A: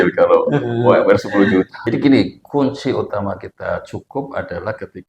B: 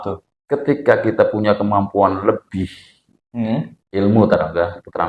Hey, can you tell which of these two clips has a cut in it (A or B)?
A